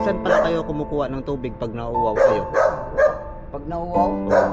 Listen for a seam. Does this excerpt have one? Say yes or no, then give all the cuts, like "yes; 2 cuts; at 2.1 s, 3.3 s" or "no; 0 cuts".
no; 0 cuts